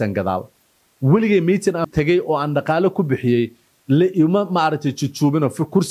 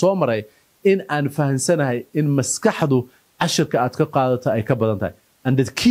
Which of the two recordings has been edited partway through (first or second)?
first